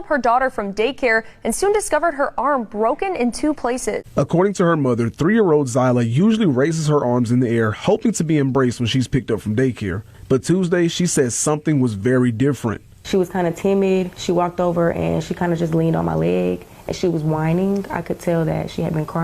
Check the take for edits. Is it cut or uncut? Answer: cut